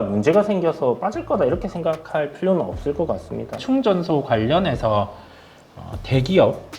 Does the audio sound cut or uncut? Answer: cut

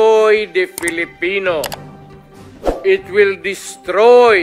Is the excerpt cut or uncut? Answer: uncut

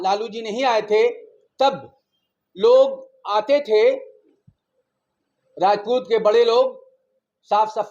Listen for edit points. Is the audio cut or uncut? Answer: uncut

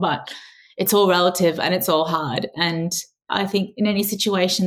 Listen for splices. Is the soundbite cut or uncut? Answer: cut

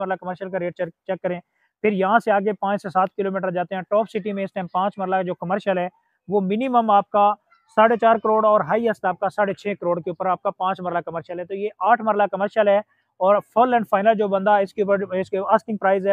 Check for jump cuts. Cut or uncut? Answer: uncut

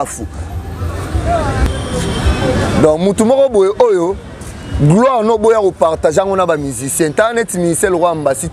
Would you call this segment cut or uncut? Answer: cut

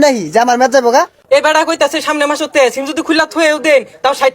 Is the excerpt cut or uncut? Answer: cut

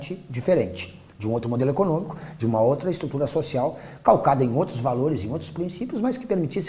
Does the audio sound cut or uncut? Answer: cut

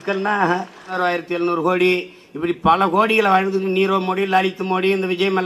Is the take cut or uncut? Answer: cut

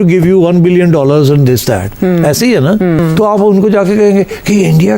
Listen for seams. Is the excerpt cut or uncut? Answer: cut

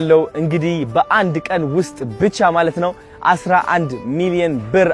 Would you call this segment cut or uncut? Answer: uncut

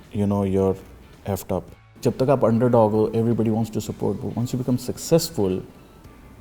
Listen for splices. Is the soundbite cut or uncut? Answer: cut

